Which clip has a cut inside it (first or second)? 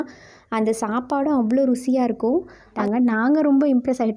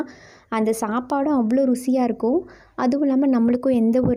first